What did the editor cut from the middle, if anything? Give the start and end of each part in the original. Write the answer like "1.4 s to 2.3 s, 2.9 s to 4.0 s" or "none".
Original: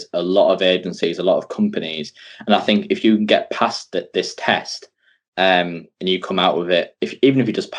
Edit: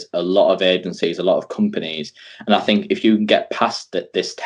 none

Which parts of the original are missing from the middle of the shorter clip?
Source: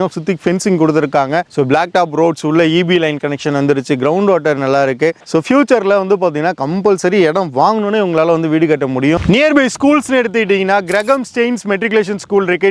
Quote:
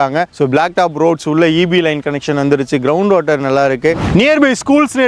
5.2 s to 9.2 s

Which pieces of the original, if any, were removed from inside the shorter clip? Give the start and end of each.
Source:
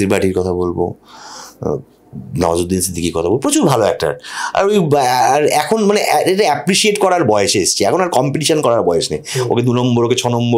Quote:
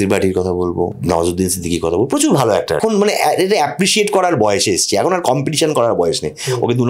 1.0 s to 2.3 s, 4.1 s to 5.7 s

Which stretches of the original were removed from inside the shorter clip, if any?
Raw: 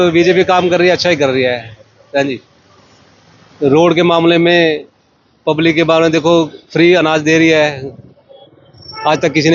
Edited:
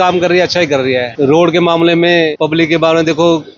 1.6 s to 3.5 s, 4.8 s to 5.4 s

